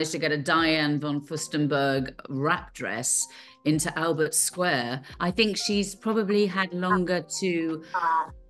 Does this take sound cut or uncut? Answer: cut